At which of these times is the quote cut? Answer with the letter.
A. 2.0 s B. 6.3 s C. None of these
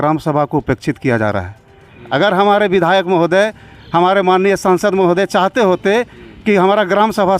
A